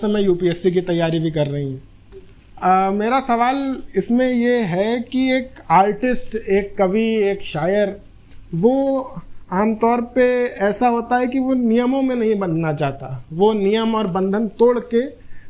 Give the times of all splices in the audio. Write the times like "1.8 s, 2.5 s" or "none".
none